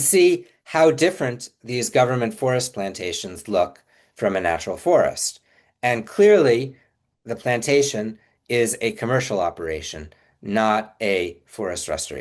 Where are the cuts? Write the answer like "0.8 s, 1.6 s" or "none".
none